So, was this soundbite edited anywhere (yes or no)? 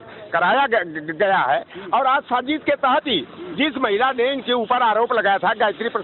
no